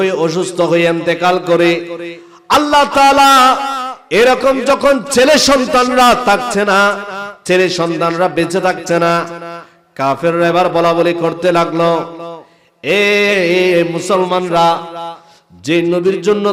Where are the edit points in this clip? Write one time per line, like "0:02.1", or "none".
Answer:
none

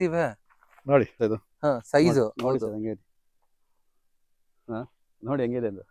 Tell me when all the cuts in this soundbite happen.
0:01.2

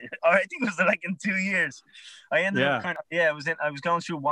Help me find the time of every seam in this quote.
0:03.0

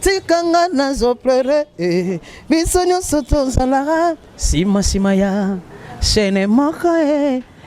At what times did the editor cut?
none

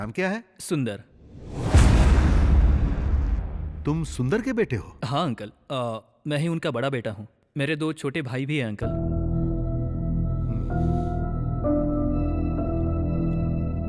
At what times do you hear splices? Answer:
none

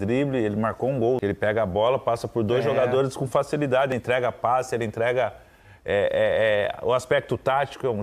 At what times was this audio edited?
0:01.2
0:03.9

